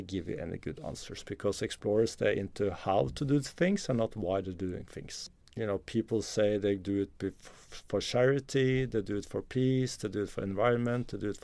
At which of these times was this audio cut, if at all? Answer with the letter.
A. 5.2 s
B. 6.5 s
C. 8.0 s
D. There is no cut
A